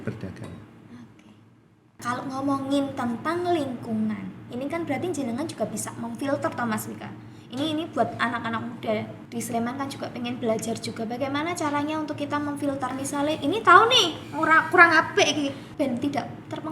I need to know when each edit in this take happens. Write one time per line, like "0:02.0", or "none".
0:02.0
0:09.2
0:12.9
0:15.6